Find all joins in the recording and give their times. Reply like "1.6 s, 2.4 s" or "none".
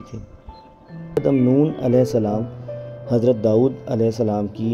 1.2 s